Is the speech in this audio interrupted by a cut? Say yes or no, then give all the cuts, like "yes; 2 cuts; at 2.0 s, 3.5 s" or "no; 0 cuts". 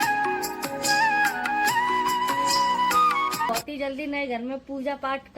yes; 1 cut; at 3.5 s